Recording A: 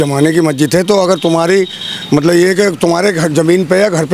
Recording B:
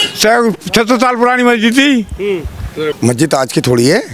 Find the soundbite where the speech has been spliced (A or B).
B